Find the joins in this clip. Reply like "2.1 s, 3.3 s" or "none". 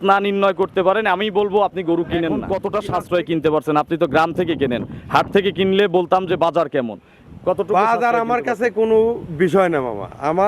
2.6 s